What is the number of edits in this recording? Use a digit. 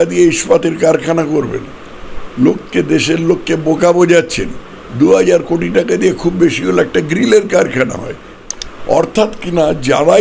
1